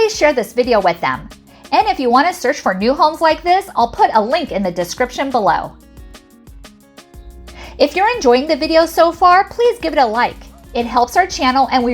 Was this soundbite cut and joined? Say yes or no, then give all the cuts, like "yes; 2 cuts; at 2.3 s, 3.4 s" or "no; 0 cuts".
yes; 2 cuts; at 5.8 s, 7.5 s